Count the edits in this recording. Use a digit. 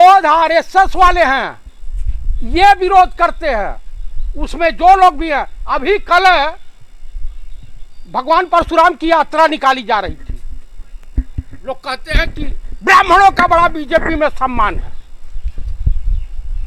0